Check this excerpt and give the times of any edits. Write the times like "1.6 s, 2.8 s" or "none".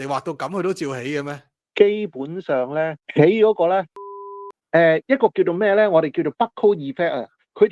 4.0 s